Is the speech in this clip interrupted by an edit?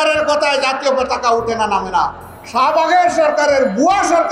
no; 0 cuts

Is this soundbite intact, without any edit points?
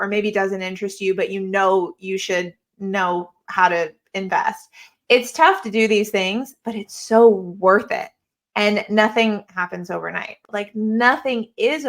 no; 1 cut; at 10.4 s

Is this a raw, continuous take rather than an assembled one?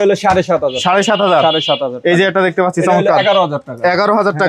yes; 0 cuts

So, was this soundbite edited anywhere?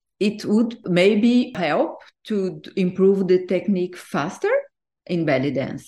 yes; 2 cuts; at 0.8 s, 1.6 s

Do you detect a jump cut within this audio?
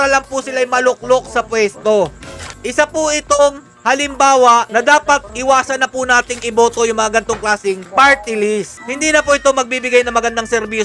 no; 0 cuts

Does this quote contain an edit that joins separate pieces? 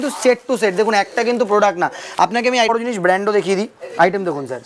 yes; 1 cut; at 2.7 s

